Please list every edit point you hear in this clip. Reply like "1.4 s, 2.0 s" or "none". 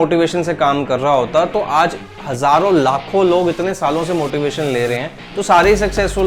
none